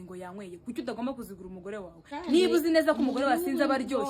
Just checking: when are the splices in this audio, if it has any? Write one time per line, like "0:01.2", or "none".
0:02.0